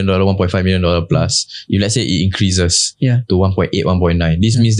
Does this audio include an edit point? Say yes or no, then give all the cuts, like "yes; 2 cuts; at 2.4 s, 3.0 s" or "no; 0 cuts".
no; 0 cuts